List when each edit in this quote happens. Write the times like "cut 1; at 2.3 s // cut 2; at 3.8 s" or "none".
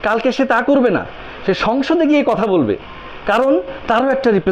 none